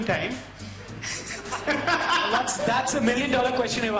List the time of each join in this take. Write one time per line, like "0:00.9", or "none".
none